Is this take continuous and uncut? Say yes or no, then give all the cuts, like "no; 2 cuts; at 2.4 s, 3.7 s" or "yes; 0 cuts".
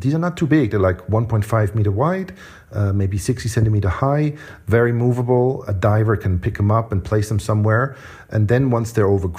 no; 1 cut; at 8.1 s